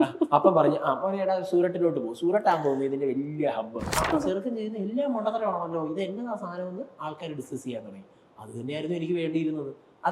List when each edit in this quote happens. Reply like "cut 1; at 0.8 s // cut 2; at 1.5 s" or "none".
cut 1; at 4.1 s